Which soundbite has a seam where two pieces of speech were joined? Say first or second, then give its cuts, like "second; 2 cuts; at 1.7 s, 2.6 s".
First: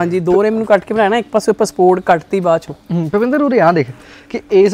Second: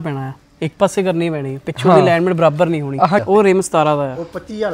second; 1 cut; at 3.2 s